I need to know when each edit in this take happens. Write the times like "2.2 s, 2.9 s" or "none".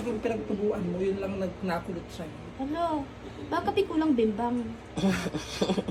none